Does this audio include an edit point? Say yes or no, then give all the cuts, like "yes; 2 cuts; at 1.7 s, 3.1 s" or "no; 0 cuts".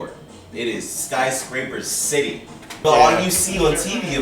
yes; 1 cut; at 2.7 s